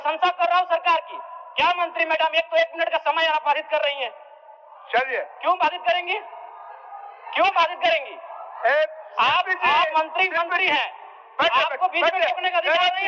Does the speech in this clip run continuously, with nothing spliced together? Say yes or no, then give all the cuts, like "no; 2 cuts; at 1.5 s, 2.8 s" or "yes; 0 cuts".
yes; 0 cuts